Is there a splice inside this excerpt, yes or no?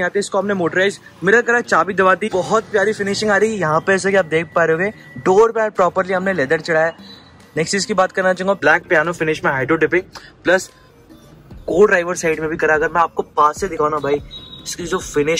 yes